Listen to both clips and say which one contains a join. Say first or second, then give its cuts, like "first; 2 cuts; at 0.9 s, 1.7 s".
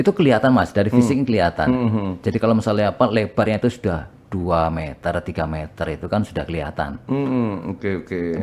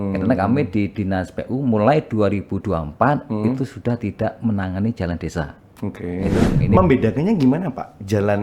second; 1 cut; at 6.8 s